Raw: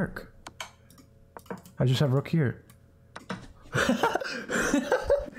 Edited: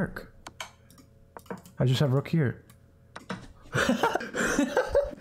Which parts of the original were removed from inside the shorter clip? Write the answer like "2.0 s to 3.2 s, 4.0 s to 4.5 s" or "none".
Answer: 4.3 s to 4.4 s